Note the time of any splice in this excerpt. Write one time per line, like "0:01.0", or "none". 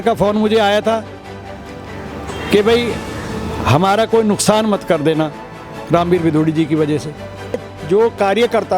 0:07.7

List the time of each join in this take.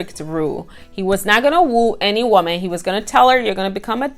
none

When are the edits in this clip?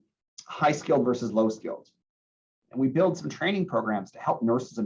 0:02.1

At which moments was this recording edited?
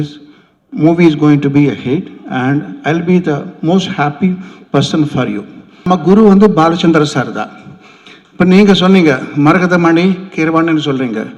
0:05.8

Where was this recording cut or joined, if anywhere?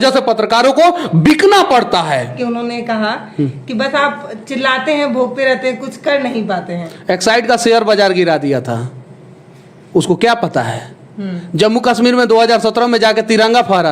0:02.3

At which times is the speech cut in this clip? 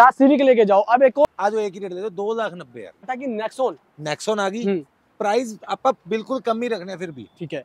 0:01.2
0:03.2

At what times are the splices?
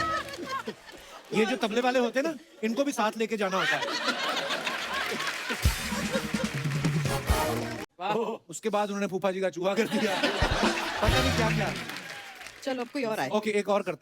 0:07.8

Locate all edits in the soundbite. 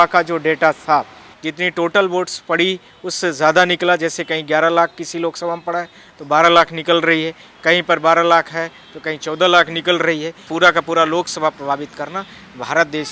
0:01.2
0:10.4

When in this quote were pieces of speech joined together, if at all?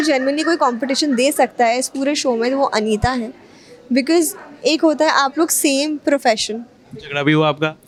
none

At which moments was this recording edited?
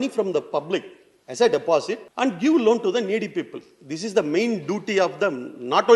0:02.0

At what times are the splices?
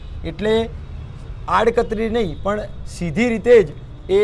none

